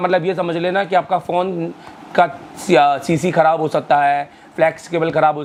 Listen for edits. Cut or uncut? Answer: uncut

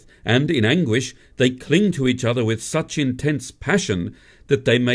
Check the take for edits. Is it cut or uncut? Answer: cut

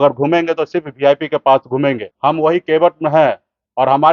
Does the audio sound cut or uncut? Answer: cut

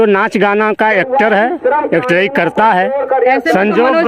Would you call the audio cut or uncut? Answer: uncut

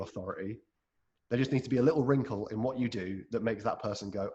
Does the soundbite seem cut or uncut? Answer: uncut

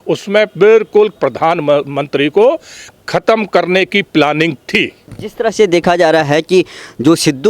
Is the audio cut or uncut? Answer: uncut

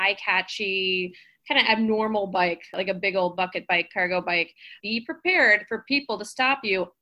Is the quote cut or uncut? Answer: cut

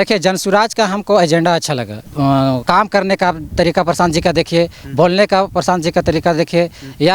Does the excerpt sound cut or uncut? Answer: cut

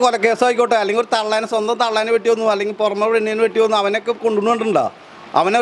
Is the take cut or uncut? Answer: uncut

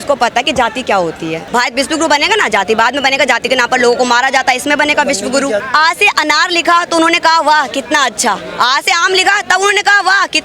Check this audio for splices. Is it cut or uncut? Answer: cut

